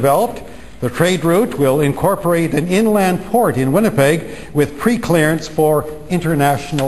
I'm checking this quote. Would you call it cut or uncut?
uncut